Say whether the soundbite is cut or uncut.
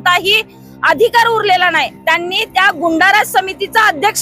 cut